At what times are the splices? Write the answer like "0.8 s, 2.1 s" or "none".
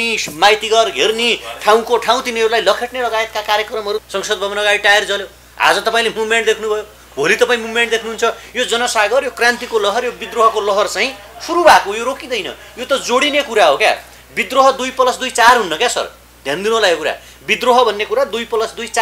4.0 s